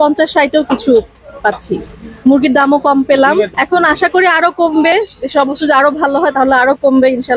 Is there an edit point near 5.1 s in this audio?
no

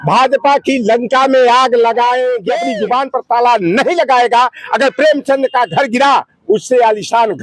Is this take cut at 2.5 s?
yes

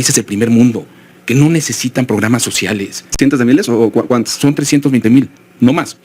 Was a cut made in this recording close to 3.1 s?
yes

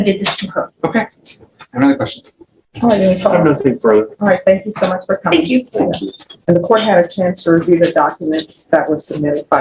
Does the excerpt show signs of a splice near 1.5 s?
no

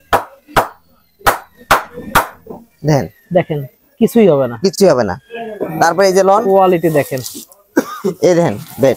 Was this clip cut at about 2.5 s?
no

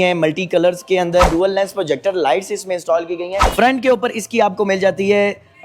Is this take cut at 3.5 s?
yes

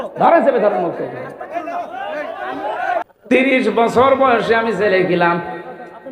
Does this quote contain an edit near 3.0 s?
yes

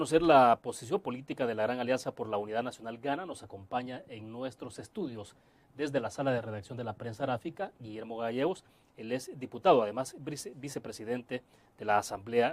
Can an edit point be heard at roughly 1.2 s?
yes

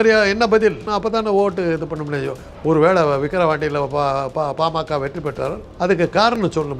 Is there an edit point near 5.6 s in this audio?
yes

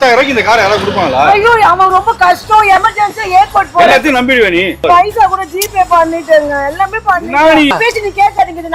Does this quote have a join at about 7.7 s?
yes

